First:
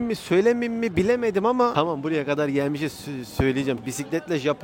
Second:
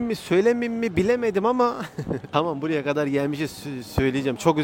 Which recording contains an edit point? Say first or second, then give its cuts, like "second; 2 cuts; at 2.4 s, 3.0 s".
first; 2 cuts; at 1.7 s, 3.8 s